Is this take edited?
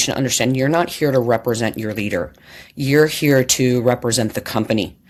no; 0 cuts

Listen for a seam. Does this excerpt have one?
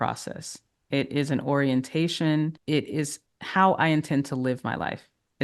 yes; 1 cut; at 2.6 s

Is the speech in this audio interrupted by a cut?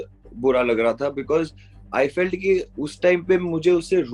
no; 0 cuts

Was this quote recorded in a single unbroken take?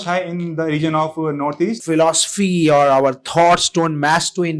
no; 1 cut; at 1.8 s

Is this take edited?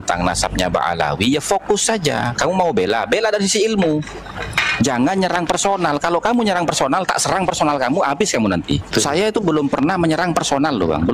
yes; 1 cut; at 8.9 s

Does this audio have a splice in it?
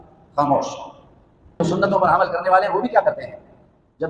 yes; 1 cut; at 1.6 s

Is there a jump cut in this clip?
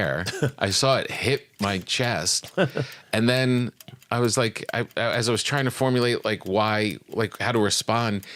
no; 0 cuts

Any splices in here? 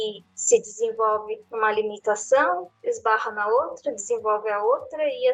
no; 0 cuts

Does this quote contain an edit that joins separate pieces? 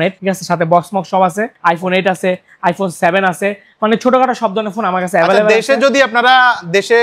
no; 0 cuts

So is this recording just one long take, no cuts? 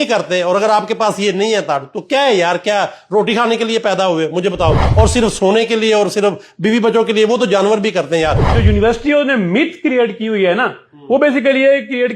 no; 1 cut; at 8.5 s

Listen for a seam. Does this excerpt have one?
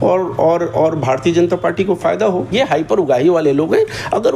yes; 1 cut; at 2.5 s

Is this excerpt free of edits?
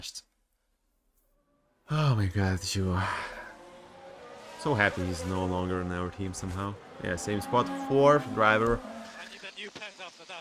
yes; 0 cuts

